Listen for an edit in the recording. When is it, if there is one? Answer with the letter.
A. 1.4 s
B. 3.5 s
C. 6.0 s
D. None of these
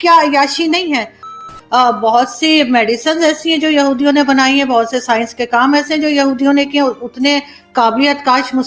A